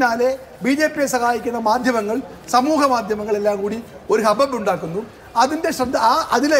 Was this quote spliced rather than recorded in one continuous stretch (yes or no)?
no